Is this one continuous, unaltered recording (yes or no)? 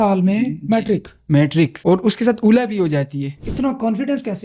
no